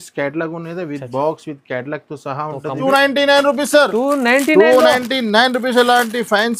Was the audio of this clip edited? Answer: yes; 1 cut; at 2.8 s

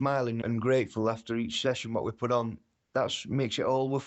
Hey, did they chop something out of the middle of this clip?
no; 0 cuts

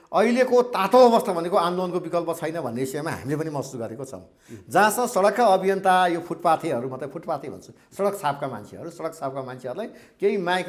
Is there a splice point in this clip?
no; 0 cuts

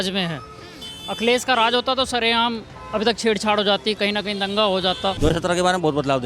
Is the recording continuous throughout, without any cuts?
no; 1 cut; at 5.2 s

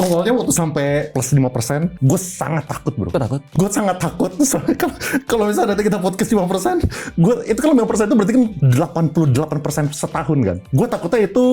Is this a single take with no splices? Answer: no; 5 cuts; at 1.1 s, 2.0 s, 3.5 s, 8.6 s, 10.6 s

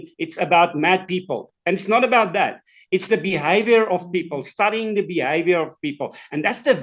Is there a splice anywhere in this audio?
no; 0 cuts

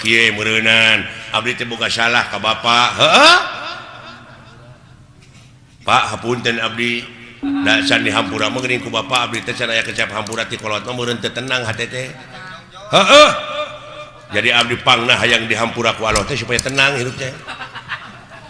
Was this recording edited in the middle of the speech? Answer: no; 0 cuts

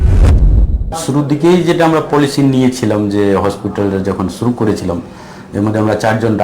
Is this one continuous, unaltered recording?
no; 1 cut; at 0.9 s

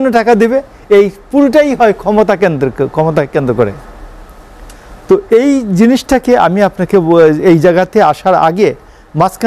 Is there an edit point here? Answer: no; 0 cuts

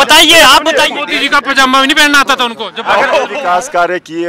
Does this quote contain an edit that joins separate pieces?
yes; 2 cuts; at 1.0 s, 3.4 s

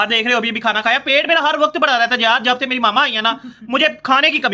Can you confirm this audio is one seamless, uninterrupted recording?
yes; 0 cuts

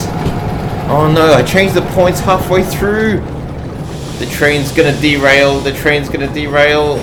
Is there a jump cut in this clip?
no; 0 cuts

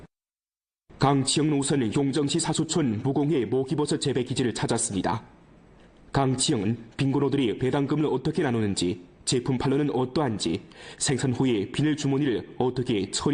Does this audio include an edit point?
yes; 1 cut; at 9.1 s

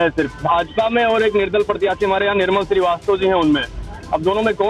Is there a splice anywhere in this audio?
no; 0 cuts

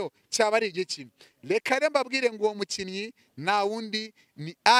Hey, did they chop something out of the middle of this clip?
no; 0 cuts

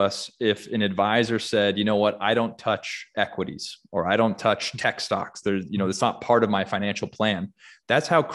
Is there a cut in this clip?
no; 0 cuts

